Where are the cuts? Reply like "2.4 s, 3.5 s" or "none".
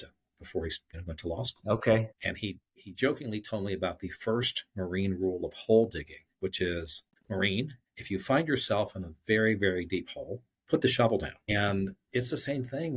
none